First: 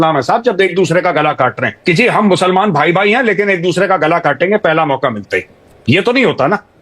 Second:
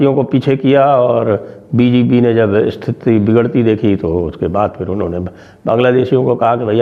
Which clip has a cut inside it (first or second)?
first